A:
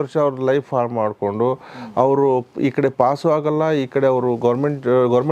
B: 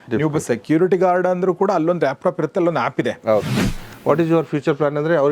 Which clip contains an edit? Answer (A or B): B